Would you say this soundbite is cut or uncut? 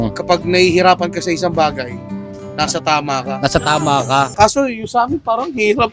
cut